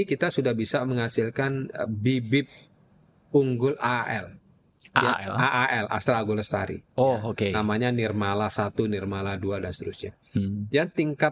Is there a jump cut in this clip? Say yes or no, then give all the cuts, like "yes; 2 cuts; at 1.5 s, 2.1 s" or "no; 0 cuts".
no; 0 cuts